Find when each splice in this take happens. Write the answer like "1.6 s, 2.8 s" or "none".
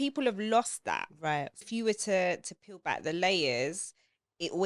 1.6 s